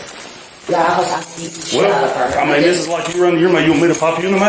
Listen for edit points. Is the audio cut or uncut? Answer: uncut